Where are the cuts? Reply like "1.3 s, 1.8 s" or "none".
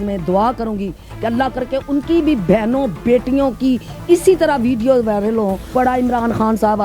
5.6 s